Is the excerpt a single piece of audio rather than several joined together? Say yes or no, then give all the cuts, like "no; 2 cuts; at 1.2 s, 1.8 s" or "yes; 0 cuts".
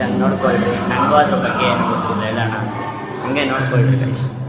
yes; 0 cuts